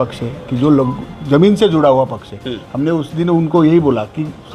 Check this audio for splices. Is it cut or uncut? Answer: uncut